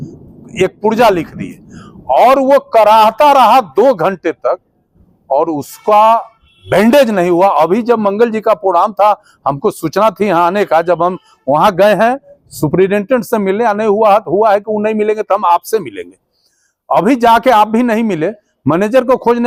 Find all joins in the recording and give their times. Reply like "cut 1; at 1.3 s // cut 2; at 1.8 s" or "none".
none